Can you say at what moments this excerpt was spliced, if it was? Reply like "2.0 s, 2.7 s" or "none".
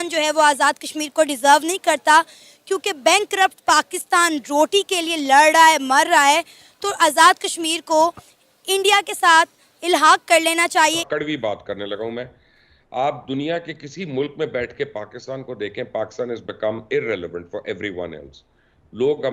11.0 s